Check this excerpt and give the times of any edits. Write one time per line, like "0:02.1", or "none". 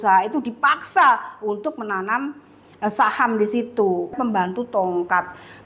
0:04.2